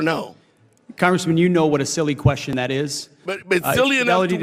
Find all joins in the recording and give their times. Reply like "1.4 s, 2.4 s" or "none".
none